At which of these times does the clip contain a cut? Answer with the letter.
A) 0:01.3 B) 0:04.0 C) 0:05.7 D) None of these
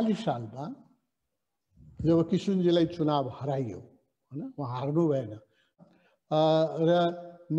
C